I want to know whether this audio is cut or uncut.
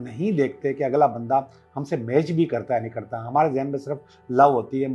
uncut